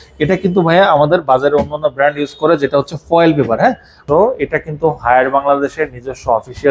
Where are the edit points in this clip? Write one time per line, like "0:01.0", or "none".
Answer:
0:04.0